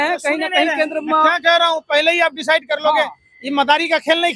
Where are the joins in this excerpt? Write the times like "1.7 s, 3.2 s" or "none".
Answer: none

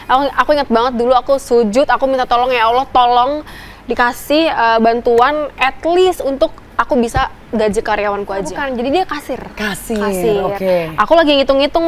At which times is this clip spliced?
8.6 s

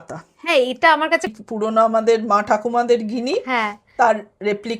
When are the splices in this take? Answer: 1.3 s

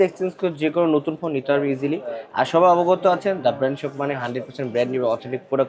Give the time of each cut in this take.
none

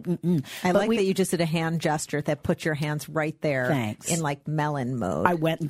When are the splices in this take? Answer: none

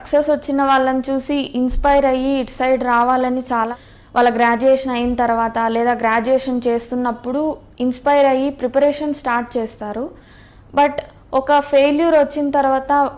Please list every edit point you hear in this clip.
3.7 s

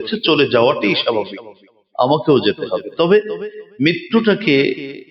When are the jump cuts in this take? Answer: none

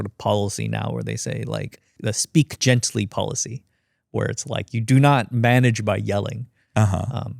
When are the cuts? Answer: 4.7 s

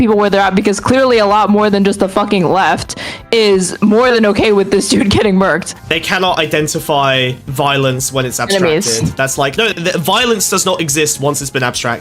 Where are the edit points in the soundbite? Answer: 5.9 s, 7.4 s, 9.6 s

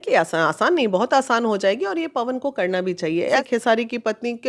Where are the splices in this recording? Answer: 3.3 s

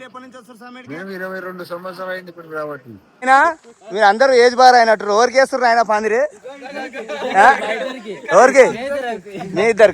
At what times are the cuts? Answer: 3.2 s

